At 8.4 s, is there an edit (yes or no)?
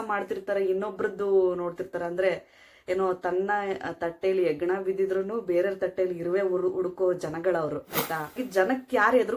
yes